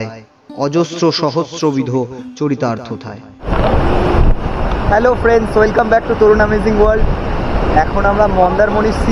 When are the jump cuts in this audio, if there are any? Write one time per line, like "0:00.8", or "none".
0:03.5

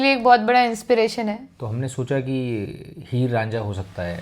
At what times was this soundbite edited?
0:01.5

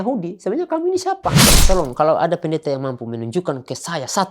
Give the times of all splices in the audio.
0:01.5

